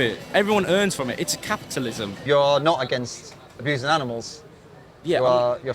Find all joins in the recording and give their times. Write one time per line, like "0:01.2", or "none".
0:02.1